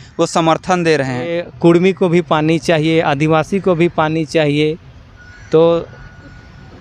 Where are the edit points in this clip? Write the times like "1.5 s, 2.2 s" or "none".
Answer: 1.4 s